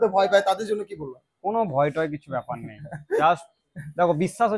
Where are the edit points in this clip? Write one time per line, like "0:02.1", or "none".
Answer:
none